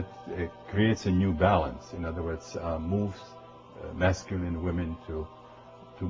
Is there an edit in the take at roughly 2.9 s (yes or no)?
no